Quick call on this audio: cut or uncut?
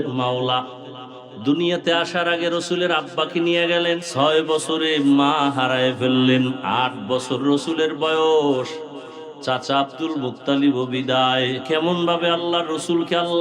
cut